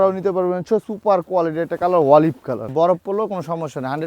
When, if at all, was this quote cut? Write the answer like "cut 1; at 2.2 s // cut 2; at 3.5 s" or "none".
cut 1; at 0.9 s // cut 2; at 2.7 s